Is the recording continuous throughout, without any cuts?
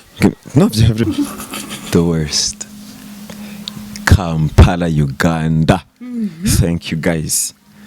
no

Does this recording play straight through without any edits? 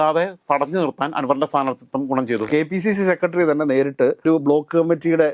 no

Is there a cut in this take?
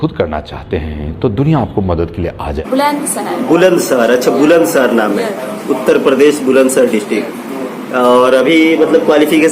yes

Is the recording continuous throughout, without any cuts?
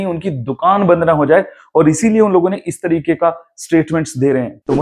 yes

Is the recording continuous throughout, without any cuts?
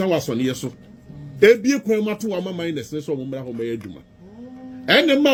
yes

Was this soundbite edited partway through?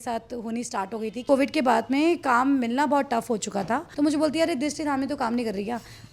yes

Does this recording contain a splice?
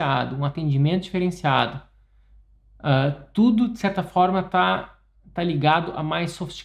no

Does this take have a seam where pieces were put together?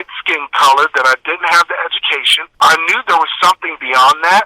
yes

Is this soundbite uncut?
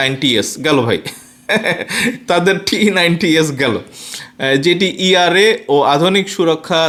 yes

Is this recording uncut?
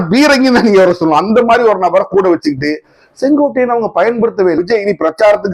no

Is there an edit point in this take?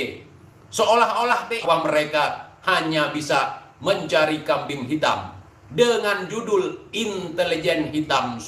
yes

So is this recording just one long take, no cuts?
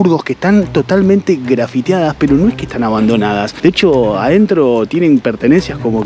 yes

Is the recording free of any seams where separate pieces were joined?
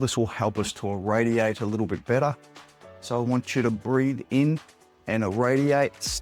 yes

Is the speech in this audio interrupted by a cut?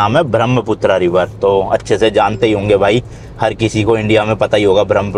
no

